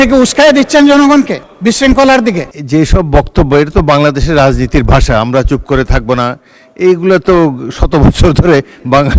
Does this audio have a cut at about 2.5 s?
yes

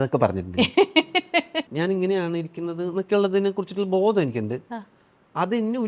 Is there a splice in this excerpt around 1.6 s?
yes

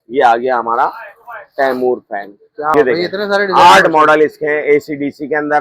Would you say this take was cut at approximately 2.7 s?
yes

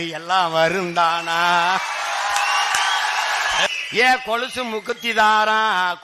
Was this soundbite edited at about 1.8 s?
no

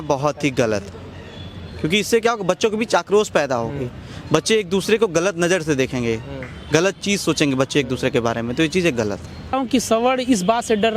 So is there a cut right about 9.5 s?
yes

